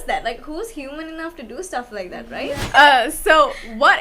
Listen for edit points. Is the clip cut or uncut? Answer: cut